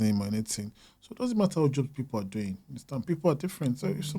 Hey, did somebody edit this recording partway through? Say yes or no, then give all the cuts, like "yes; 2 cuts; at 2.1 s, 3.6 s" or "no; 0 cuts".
no; 0 cuts